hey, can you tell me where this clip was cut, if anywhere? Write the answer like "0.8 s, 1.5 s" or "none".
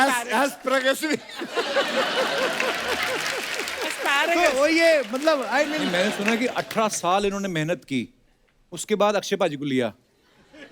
5.8 s